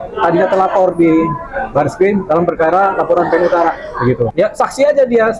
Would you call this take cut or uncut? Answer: cut